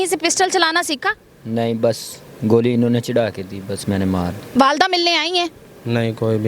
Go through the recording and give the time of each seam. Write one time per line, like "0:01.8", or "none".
0:04.5